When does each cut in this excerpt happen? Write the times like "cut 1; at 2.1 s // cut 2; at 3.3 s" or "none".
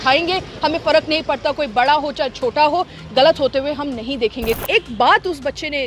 cut 1; at 4.6 s